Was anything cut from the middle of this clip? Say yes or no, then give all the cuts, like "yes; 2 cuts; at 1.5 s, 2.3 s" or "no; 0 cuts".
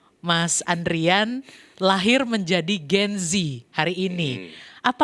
no; 0 cuts